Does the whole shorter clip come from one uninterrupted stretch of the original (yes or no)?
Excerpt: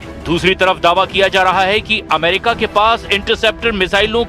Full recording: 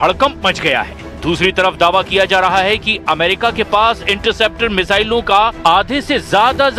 yes